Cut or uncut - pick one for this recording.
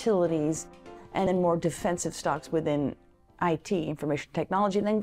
cut